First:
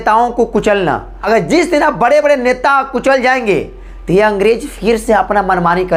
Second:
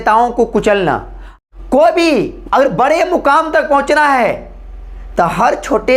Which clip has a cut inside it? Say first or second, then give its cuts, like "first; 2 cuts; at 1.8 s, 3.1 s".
second; 1 cut; at 1.1 s